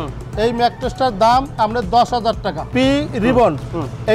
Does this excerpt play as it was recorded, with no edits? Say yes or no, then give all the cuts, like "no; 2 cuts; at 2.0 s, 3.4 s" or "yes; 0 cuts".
no; 1 cut; at 2.7 s